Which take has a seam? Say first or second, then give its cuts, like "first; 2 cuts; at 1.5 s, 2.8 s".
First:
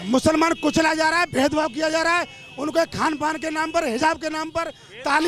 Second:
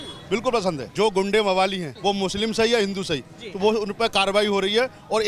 second; 2 cuts; at 0.9 s, 1.9 s